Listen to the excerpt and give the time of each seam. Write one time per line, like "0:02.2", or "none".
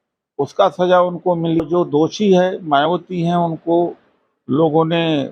0:01.7